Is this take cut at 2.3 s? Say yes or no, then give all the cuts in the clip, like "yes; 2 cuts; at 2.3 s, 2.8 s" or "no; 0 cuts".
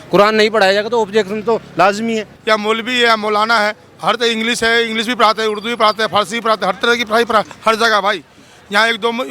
yes; 1 cut; at 2.3 s